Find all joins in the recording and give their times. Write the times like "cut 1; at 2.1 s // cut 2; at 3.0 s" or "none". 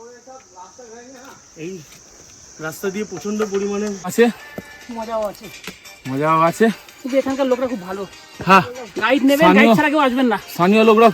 cut 1; at 4.1 s